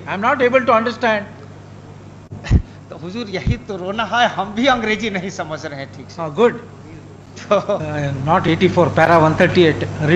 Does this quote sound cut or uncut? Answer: uncut